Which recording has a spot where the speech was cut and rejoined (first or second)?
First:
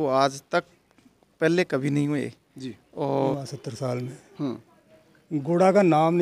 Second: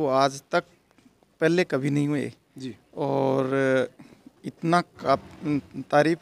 first